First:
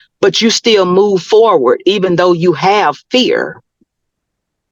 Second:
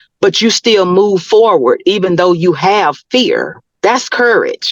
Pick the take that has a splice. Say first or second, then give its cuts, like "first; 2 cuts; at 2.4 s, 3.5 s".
second; 1 cut; at 3.6 s